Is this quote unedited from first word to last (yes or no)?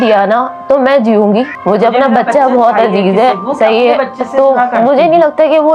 no